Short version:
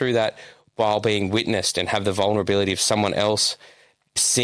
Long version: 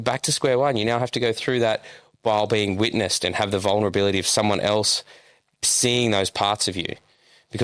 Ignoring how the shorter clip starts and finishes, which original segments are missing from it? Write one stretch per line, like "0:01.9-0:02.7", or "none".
none